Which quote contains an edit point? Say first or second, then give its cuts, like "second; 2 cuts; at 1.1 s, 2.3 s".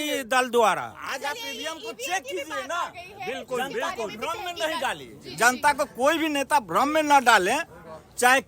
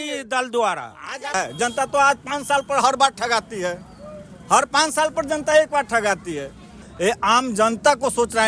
second; 2 cuts; at 1.3 s, 6.8 s